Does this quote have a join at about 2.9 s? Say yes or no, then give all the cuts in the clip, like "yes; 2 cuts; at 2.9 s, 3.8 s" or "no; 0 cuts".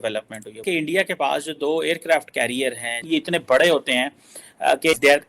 yes; 1 cut; at 2.9 s